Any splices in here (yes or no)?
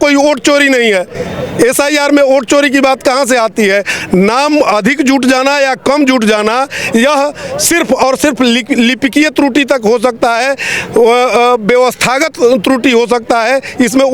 no